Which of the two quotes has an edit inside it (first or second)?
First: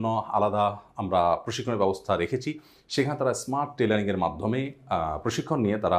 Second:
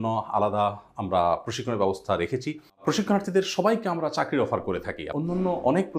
second